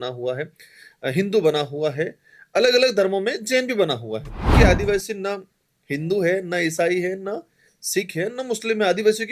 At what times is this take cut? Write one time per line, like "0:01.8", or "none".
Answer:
0:04.5